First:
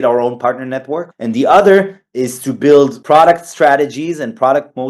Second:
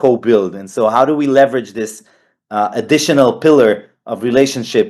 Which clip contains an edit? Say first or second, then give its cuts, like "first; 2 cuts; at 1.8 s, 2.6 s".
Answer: first; 2 cuts; at 1.1 s, 3.0 s